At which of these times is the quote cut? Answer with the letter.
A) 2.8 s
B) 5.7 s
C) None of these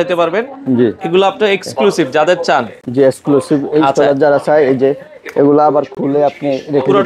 C